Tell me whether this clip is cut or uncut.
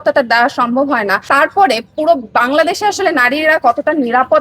cut